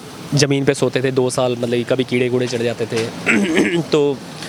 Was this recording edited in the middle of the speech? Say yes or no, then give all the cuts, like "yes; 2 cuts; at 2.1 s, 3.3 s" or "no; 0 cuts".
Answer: no; 0 cuts